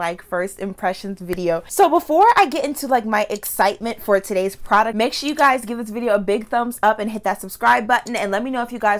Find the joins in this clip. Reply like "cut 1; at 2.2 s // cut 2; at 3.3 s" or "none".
cut 1; at 1.7 s // cut 2; at 4.9 s